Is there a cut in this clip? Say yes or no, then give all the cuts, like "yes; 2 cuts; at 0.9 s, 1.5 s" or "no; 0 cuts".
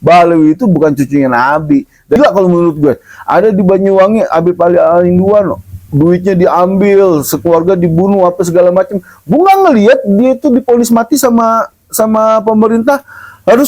yes; 1 cut; at 2.2 s